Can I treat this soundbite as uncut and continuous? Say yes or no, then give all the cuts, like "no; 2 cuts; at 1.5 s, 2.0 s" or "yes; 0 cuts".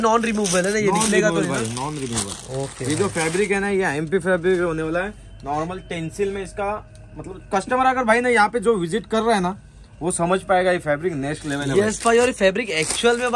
yes; 0 cuts